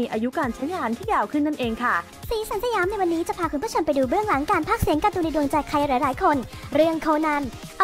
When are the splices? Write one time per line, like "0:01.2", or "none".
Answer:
0:02.1